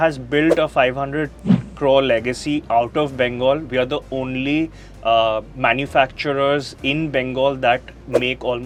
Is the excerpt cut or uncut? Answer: uncut